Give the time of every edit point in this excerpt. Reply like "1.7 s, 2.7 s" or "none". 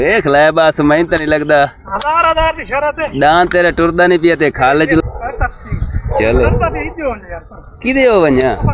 3.6 s, 5.0 s